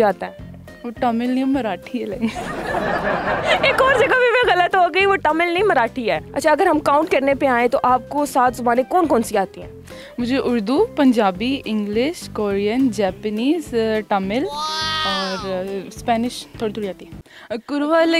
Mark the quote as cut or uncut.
cut